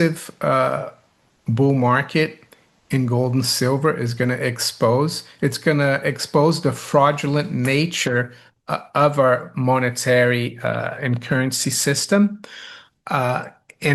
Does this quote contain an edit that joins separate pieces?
no; 0 cuts

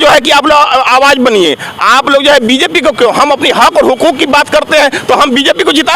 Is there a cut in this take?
no; 0 cuts

